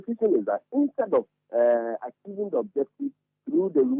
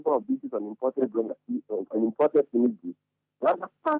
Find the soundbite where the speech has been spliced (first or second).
first